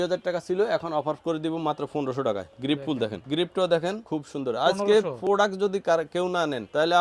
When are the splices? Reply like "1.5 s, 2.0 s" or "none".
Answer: none

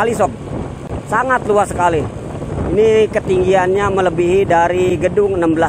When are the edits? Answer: none

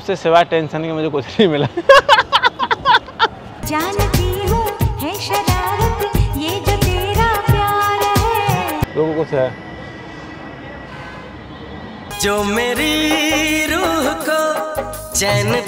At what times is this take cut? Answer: 8.9 s

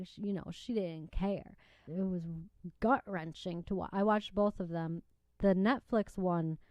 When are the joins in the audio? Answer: 1.9 s

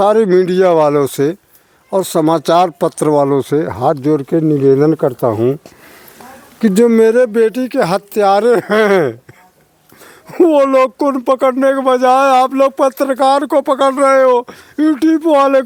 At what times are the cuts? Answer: none

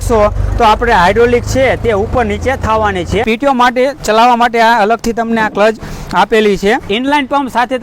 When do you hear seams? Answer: 3.2 s, 6.9 s

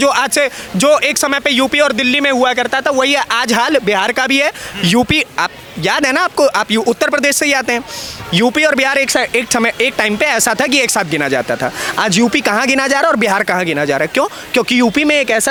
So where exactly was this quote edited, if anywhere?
none

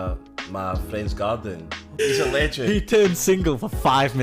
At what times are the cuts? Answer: 2.0 s

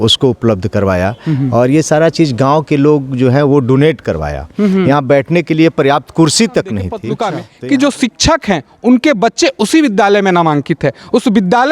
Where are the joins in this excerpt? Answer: 7.2 s

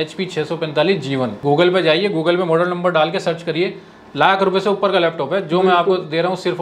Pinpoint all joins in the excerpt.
1.4 s

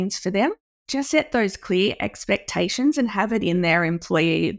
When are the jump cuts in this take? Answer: 1.0 s

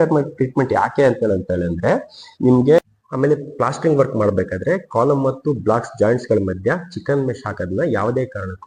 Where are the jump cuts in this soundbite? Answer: 2.9 s

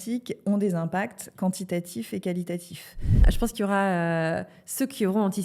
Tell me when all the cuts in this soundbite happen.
3.3 s

